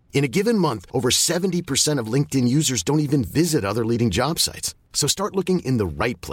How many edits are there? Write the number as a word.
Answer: zero